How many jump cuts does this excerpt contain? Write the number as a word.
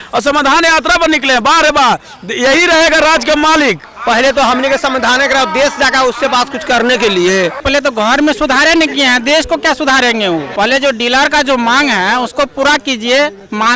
three